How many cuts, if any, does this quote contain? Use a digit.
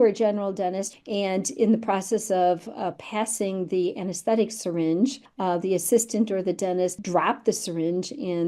3